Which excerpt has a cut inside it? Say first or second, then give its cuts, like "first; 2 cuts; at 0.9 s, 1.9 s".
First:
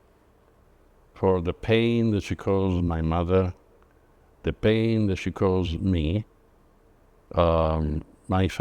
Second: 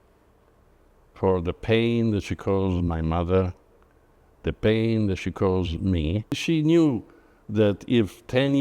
second; 1 cut; at 6.4 s